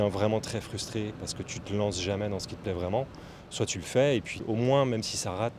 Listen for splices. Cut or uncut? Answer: cut